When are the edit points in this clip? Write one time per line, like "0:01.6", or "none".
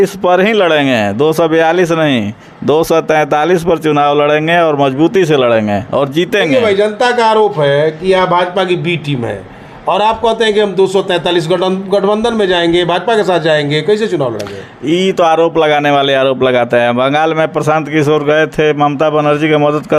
none